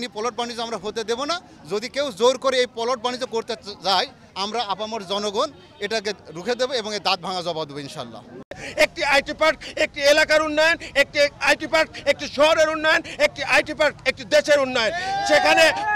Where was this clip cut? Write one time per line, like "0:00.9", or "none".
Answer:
0:08.6